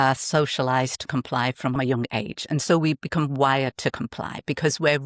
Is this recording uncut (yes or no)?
no